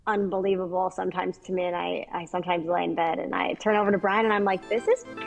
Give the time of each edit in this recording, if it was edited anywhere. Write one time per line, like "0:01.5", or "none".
none